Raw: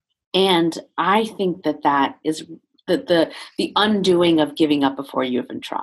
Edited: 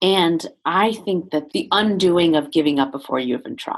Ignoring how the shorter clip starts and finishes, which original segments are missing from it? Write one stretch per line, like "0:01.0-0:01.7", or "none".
0:01.8-0:03.5

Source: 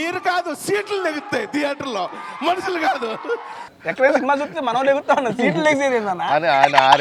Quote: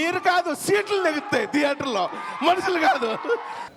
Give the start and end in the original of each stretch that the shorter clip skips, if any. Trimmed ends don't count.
none

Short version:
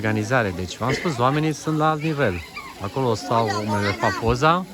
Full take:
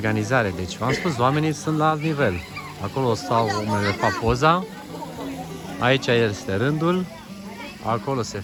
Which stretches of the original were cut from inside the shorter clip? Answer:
none

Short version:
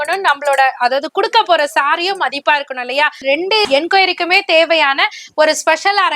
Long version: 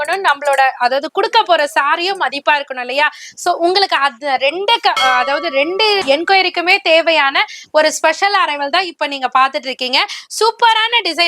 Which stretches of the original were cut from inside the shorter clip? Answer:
0:03.5-0:05.9

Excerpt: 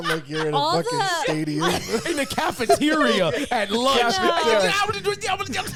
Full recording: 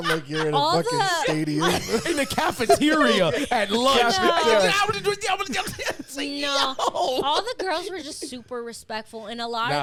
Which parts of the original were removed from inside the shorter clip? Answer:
none

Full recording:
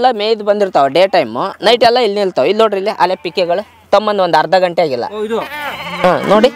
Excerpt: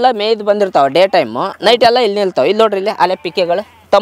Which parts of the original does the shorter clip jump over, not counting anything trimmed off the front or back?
none

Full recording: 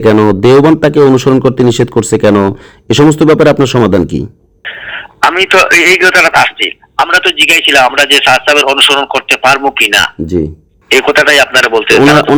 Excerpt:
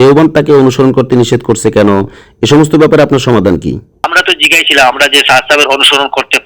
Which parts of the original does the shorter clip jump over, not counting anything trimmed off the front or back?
0:04.6-0:07.1

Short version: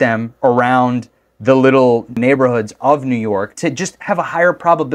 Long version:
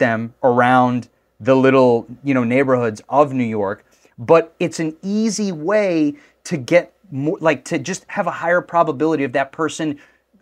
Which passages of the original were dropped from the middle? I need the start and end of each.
0:02.2-0:02.5
0:03.8-0:07.6

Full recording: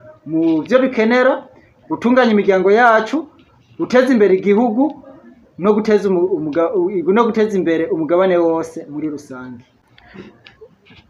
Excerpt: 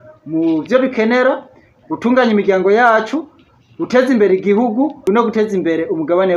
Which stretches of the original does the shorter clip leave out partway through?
0:05.0-0:07.0

